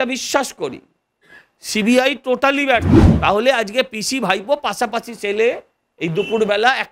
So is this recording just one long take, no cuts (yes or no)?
no